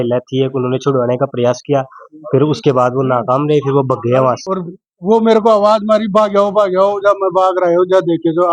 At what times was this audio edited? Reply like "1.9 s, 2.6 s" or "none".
4.4 s